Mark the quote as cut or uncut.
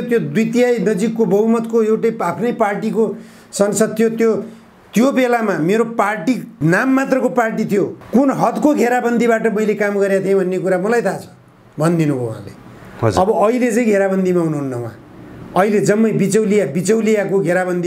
uncut